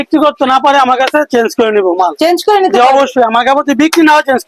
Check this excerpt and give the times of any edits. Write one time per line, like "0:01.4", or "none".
none